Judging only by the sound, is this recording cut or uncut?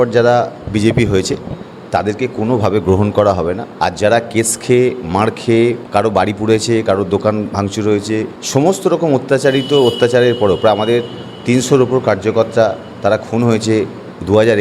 uncut